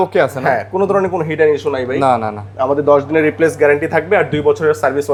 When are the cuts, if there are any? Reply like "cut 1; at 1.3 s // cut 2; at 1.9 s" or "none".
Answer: none